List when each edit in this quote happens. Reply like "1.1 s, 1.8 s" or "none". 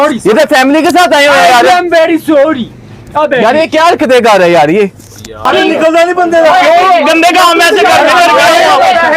5.5 s